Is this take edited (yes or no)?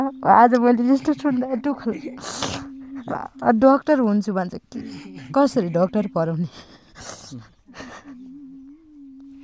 no